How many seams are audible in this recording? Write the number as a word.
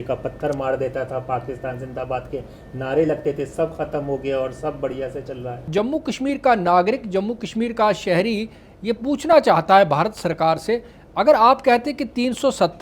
one